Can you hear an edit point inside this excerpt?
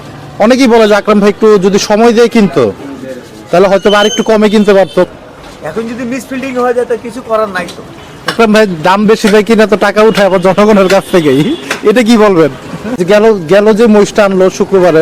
yes; 3 cuts; at 5.1 s, 8.3 s, 12.9 s

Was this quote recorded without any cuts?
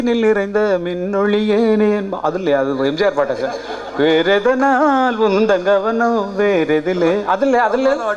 yes; 0 cuts

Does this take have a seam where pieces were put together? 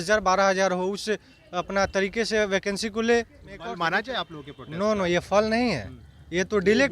yes; 1 cut; at 3.7 s

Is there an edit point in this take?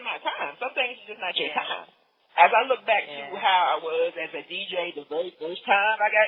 no; 0 cuts

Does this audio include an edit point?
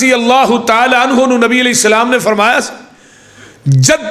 no; 0 cuts

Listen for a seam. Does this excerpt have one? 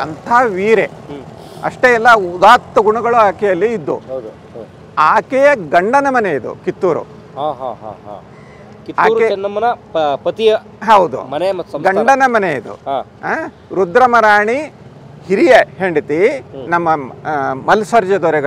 no; 0 cuts

